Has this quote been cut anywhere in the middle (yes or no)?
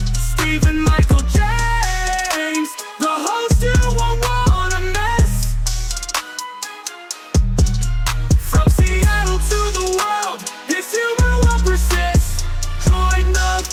no